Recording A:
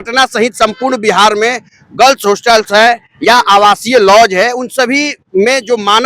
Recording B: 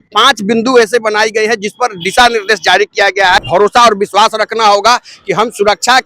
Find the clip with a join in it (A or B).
B